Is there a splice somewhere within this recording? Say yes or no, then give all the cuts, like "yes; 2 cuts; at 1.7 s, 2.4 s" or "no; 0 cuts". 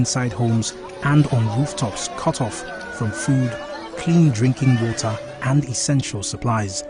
no; 0 cuts